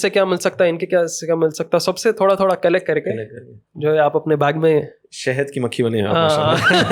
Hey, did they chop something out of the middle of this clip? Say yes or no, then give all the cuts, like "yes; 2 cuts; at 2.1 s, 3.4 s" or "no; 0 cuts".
no; 0 cuts